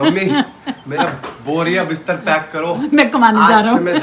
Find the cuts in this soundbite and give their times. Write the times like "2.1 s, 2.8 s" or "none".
none